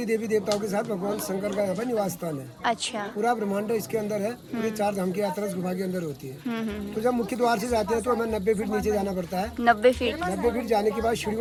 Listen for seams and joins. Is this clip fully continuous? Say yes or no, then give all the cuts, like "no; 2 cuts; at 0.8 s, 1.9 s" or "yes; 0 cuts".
yes; 0 cuts